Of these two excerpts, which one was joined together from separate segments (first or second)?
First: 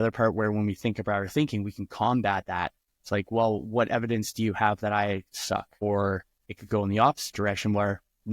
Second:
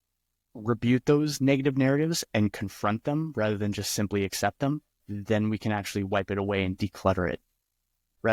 first